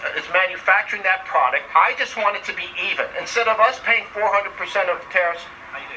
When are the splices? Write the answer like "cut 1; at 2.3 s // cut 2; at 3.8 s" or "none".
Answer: cut 1; at 1.7 s